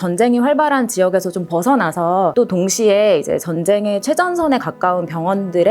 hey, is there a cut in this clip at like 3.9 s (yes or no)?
no